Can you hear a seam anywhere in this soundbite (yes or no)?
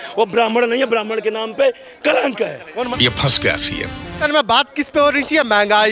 yes